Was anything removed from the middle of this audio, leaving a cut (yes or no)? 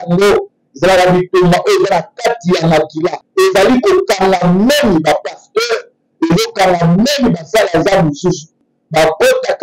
yes